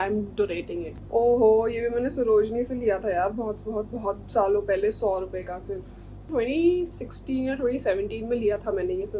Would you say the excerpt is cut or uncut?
uncut